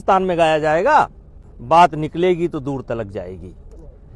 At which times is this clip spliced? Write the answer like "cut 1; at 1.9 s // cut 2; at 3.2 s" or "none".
cut 1; at 1.5 s

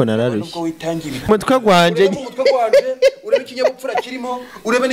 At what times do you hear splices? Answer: cut 1; at 1.3 s

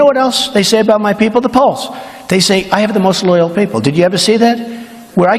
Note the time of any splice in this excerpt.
none

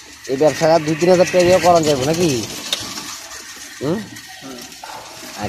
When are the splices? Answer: none

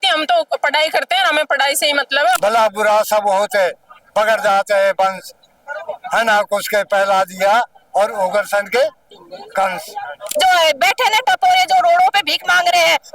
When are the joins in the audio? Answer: cut 1; at 2.4 s // cut 2; at 10.2 s

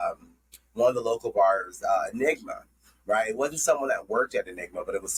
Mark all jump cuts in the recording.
none

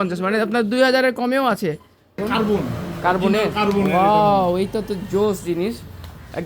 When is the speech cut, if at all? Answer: cut 1; at 2.2 s

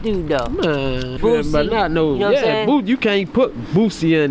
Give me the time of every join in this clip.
cut 1; at 1.1 s

